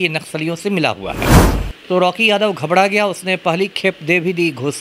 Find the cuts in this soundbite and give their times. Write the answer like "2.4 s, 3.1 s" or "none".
none